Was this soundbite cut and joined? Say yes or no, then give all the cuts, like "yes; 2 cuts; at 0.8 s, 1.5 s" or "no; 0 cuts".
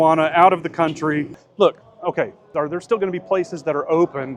yes; 2 cuts; at 1.5 s, 2.4 s